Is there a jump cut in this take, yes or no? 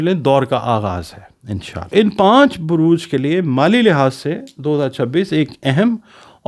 yes